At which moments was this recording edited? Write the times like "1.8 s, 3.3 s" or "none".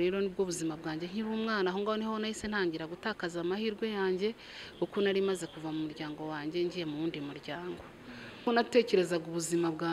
8.4 s